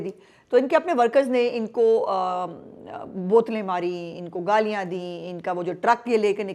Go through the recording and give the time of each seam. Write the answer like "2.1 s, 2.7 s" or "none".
none